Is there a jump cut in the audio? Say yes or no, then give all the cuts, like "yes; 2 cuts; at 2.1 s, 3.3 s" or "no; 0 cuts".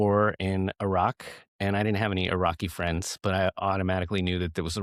no; 0 cuts